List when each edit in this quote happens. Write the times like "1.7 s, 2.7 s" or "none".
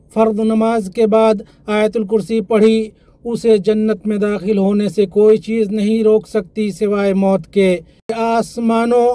8.2 s

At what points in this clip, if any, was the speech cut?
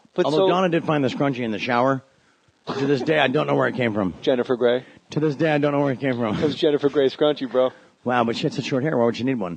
none

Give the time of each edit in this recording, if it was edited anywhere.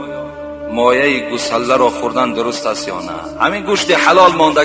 none

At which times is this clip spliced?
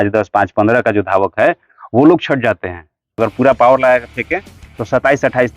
3.2 s

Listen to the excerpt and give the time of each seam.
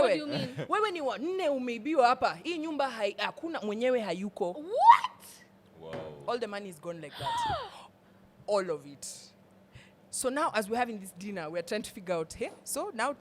none

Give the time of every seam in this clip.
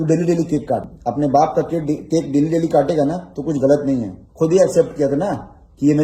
0.9 s

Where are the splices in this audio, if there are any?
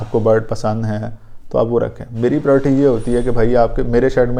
none

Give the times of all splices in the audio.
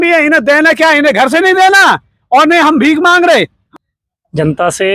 3.6 s

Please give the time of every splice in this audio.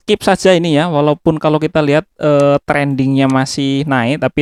none

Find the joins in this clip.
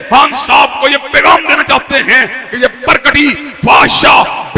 none

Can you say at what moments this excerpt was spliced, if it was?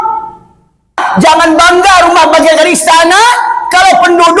1.0 s

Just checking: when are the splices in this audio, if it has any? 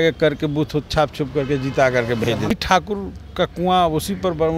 2.5 s

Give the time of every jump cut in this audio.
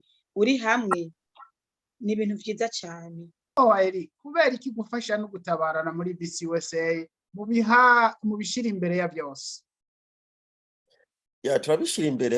3.6 s

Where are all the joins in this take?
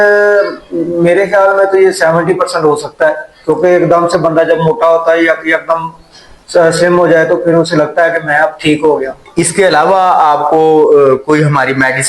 9.2 s

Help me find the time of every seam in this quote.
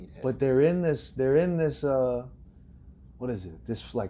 none

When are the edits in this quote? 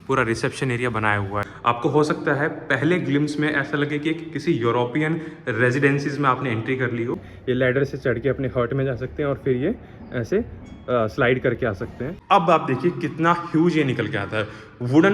1.5 s, 7.3 s, 12.1 s

